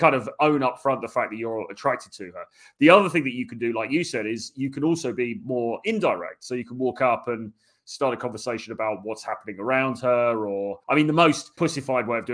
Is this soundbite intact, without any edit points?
no; 2 cuts; at 10.7 s, 11.5 s

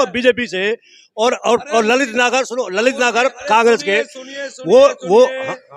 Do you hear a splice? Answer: no; 0 cuts

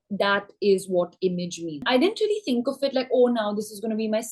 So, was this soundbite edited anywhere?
yes; 1 cut; at 1.8 s

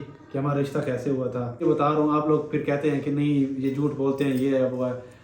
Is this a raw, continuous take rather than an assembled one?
no; 1 cut; at 1.6 s

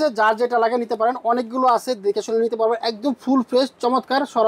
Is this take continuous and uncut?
yes; 0 cuts

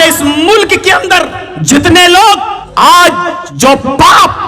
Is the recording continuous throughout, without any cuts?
no; 3 cuts; at 1.5 s, 2.6 s, 3.4 s

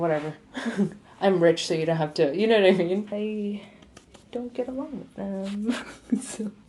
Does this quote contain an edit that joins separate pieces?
yes; 1 cut; at 3.1 s

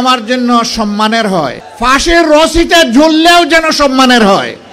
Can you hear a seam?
yes; 1 cut; at 1.6 s

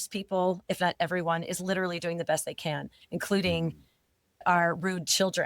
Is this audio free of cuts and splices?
no; 1 cut; at 4.4 s

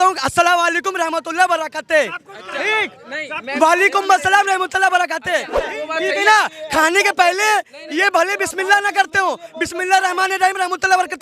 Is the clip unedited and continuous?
no; 1 cut; at 5.7 s

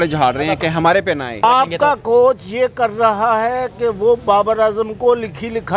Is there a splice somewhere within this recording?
yes; 1 cut; at 1.4 s

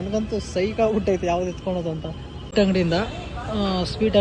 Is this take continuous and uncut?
no; 1 cut; at 2.5 s

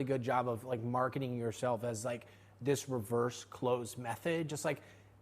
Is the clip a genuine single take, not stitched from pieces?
yes; 0 cuts

